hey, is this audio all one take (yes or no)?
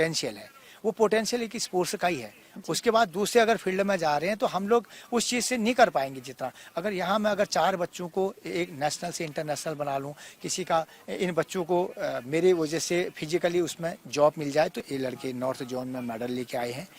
no